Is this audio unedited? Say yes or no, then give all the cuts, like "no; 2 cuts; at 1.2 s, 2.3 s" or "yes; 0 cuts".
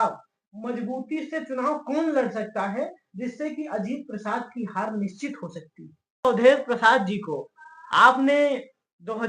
no; 1 cut; at 6.2 s